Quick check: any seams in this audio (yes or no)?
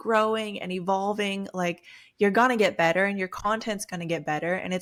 no